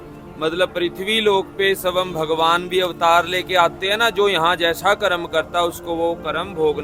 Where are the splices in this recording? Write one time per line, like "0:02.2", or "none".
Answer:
none